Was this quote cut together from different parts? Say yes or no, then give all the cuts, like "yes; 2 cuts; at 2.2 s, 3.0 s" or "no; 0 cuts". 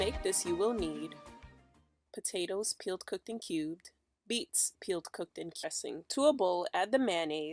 no; 0 cuts